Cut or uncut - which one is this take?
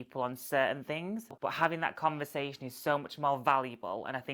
cut